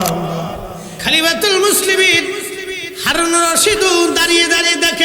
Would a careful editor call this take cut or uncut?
cut